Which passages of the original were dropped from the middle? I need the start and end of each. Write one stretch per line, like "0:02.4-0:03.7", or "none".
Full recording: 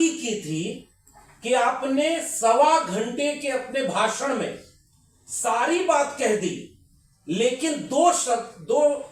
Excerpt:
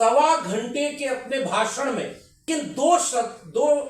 0:04.9-0:07.6